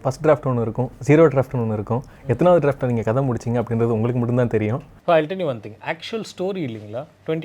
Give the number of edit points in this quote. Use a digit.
1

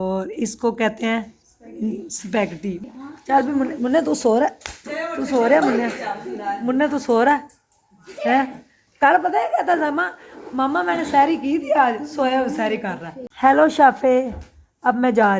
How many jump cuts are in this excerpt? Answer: 2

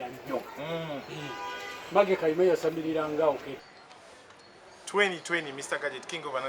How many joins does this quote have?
1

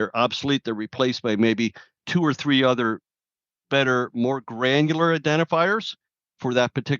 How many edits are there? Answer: 0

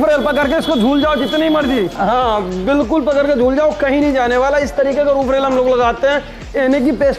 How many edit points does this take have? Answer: 0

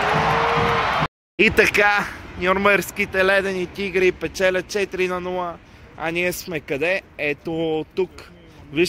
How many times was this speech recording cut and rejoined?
1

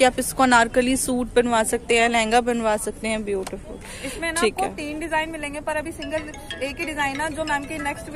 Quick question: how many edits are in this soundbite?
0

